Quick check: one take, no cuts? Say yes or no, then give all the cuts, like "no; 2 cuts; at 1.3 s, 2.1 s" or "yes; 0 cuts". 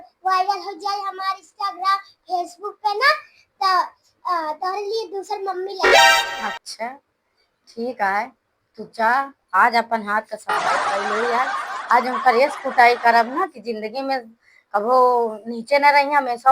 no; 2 cuts; at 5.7 s, 6.6 s